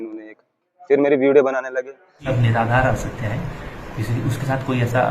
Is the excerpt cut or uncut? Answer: cut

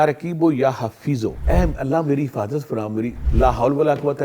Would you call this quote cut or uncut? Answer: cut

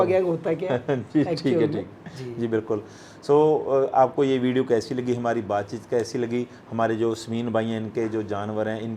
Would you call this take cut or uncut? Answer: uncut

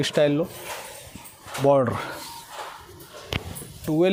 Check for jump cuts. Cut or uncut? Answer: uncut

